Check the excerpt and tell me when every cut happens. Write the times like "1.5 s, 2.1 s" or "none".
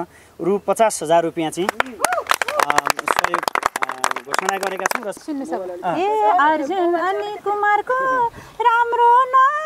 5.1 s